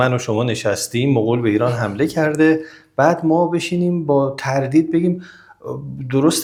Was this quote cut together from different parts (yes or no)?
no